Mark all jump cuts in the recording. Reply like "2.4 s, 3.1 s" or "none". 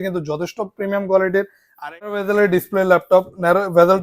2.0 s

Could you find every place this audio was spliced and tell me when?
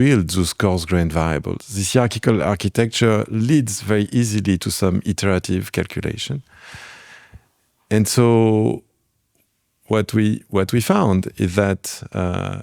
none

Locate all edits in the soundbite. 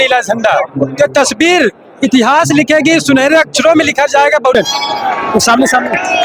4.6 s

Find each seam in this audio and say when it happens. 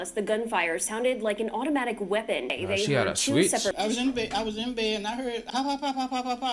2.6 s, 3.8 s, 5.4 s

